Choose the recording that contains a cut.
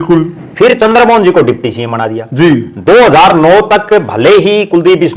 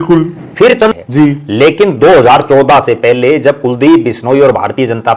second; 1 cut; at 0.9 s

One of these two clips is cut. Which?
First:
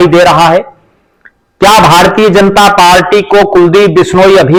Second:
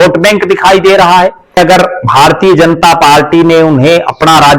second; 1 cut; at 1.6 s

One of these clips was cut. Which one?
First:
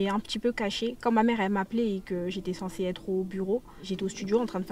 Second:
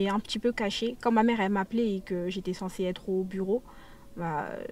first; 1 cut; at 3.8 s

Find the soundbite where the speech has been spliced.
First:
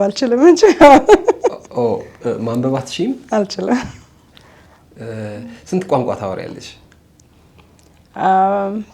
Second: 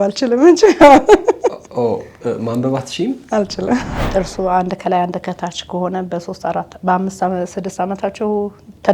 second; 1 cut; at 4.0 s

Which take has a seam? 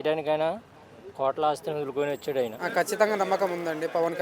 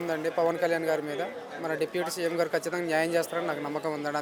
first; 1 cut; at 2.6 s

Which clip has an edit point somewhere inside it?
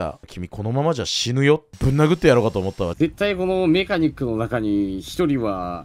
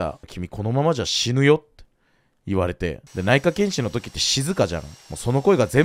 first; 2 cuts; at 1.7 s, 2.9 s

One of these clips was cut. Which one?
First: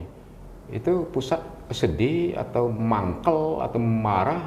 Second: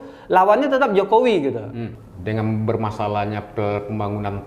second; 1 cut; at 1.8 s

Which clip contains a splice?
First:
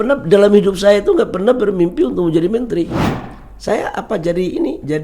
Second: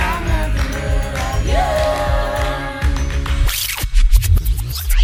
first; 1 cut; at 3.0 s

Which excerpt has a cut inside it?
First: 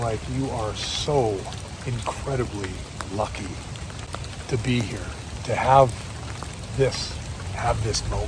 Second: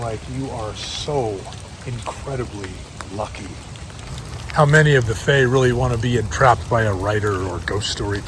second; 1 cut; at 4.0 s

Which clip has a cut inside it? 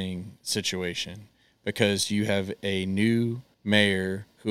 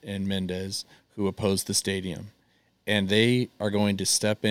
first; 1 cut; at 3.5 s

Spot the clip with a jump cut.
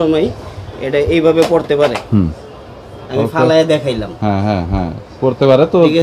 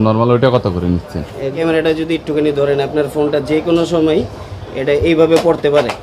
second; 1 cut; at 1.6 s

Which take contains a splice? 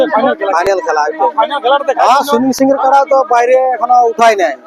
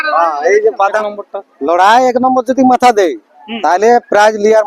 second; 1 cut; at 1.0 s

